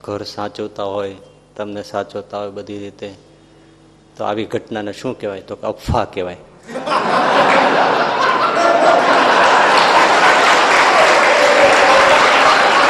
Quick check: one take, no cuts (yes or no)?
yes